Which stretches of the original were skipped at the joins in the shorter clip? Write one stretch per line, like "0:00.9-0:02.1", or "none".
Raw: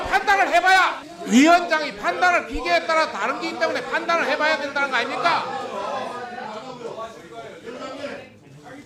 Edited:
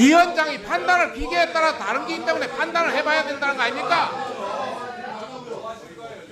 none